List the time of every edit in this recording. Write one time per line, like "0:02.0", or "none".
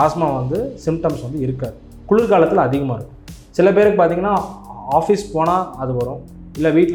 none